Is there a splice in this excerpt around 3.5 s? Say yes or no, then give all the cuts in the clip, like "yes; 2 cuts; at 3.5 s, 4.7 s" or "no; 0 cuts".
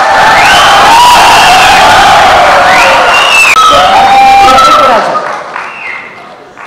no; 0 cuts